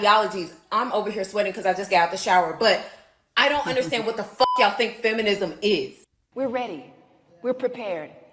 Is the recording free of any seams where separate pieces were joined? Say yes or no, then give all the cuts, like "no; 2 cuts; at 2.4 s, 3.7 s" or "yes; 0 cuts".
no; 1 cut; at 6.2 s